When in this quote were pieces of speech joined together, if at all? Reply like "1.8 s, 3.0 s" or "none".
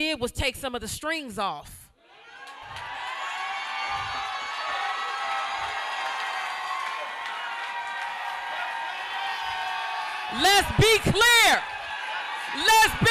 none